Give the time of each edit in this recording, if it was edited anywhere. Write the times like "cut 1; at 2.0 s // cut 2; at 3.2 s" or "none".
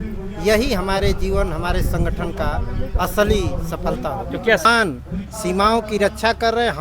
cut 1; at 4.6 s

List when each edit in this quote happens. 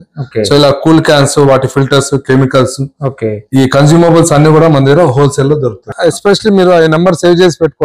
cut 1; at 5.9 s

